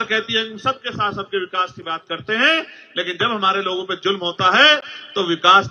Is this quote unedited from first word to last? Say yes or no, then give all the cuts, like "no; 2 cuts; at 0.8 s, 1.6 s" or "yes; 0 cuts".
yes; 0 cuts